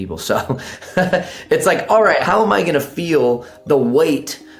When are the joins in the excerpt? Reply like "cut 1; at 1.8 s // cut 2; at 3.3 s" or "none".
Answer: cut 1; at 2.2 s